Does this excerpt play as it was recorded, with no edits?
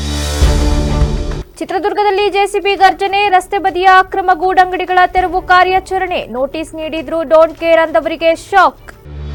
yes; 0 cuts

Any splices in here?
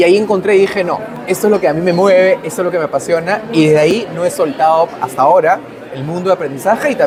no; 0 cuts

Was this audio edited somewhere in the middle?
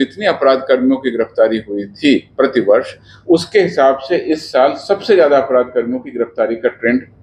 no; 0 cuts

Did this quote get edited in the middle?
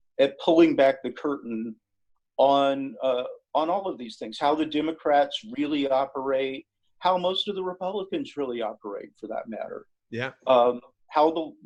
no; 0 cuts

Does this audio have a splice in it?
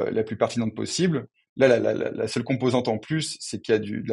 no; 0 cuts

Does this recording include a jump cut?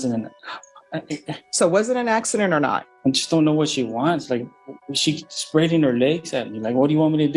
yes; 1 cut; at 2.9 s

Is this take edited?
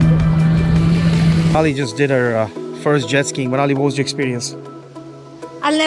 yes; 1 cut; at 1.5 s

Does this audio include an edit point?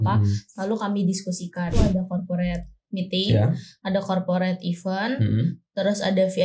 yes; 1 cut; at 1.7 s

